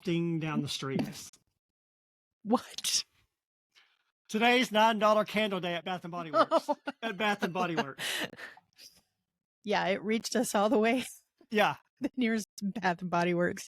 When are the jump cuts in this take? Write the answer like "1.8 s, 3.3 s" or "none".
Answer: 5.8 s